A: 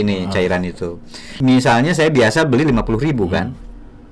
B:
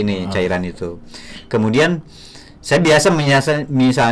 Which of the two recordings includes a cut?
A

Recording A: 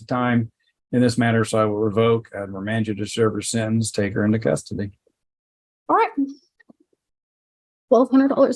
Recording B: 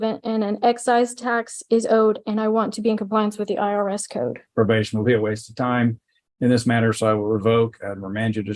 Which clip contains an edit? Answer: B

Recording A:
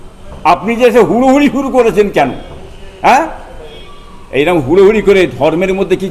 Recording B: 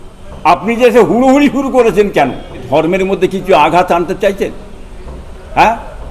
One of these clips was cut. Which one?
B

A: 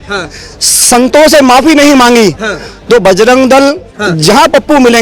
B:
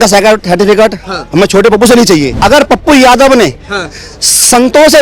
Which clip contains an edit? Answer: B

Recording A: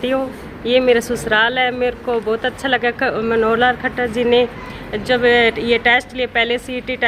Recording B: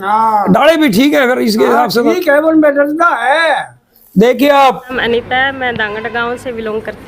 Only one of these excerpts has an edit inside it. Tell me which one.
B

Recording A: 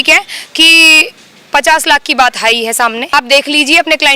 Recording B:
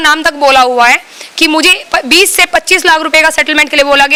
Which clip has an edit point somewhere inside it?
A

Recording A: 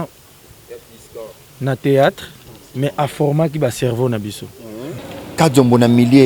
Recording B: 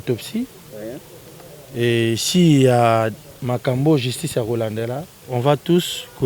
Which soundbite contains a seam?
A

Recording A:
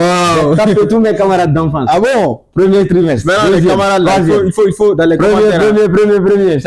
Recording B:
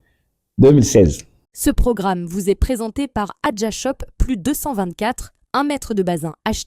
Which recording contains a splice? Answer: B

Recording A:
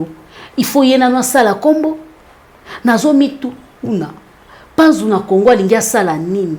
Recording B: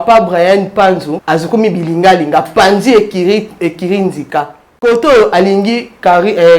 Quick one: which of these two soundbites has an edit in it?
B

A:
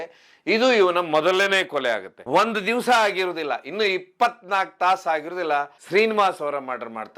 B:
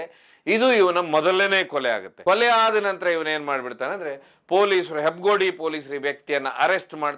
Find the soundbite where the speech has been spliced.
A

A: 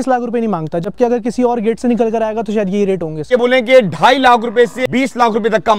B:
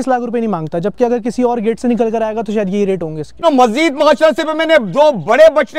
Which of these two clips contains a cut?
A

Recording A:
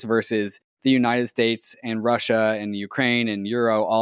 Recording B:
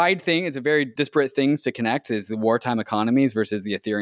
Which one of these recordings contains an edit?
B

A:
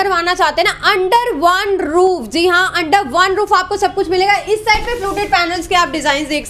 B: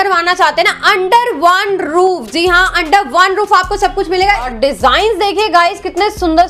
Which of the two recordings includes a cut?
B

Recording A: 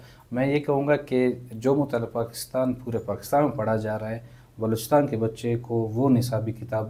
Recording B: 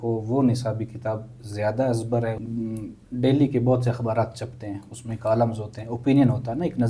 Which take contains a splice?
B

